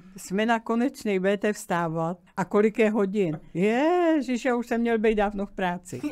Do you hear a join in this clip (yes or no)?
yes